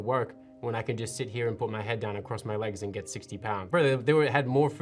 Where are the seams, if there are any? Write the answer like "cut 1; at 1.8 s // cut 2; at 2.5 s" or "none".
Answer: cut 1; at 3.6 s